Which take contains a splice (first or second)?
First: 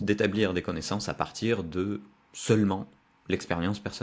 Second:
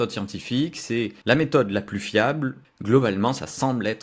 second